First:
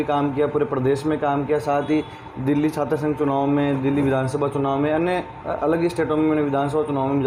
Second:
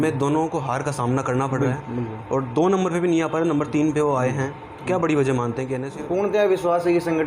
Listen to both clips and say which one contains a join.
second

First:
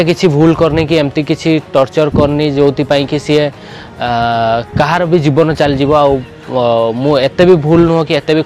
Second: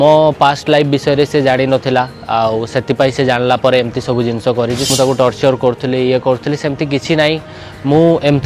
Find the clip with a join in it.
second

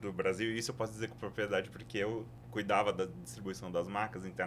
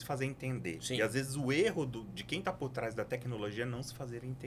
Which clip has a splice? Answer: first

